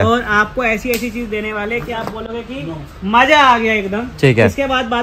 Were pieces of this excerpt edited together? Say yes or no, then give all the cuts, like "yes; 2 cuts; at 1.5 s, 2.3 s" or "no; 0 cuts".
no; 0 cuts